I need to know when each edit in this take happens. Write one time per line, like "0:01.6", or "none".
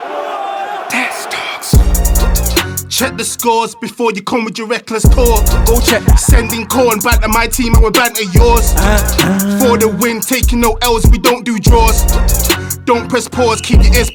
none